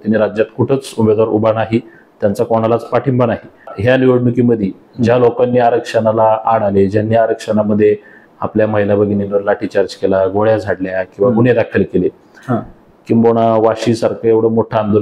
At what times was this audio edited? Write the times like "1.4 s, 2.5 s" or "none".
3.7 s